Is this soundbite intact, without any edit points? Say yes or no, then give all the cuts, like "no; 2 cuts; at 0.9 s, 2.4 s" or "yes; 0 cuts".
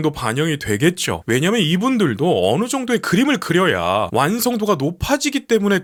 yes; 0 cuts